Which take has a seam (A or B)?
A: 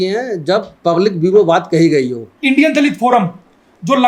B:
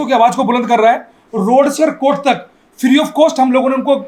A